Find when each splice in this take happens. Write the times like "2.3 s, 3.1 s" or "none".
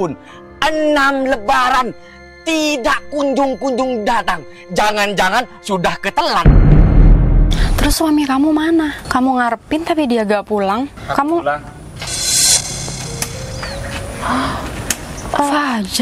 6.4 s, 7.5 s, 9.0 s, 11.0 s

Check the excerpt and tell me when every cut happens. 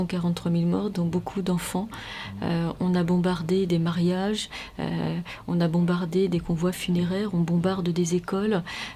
none

